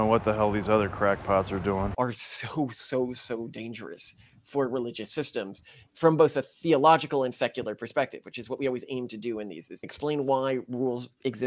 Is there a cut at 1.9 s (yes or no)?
yes